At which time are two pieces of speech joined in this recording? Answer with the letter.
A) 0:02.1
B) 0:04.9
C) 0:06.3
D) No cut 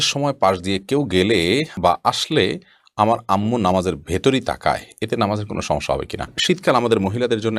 C